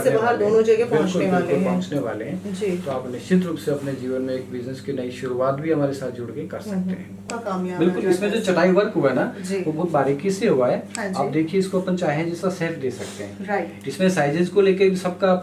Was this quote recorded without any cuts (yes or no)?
no